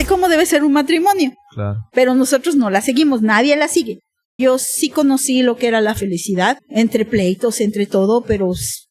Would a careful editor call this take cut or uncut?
cut